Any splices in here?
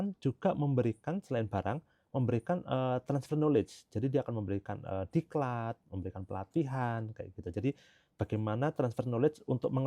no; 0 cuts

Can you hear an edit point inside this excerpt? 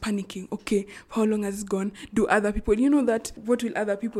no; 0 cuts

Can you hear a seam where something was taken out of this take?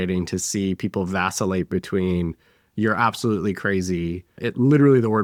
no; 0 cuts

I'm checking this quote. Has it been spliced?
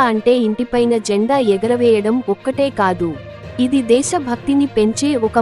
no; 0 cuts

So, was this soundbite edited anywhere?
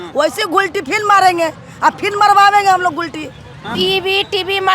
yes; 1 cut; at 3.8 s

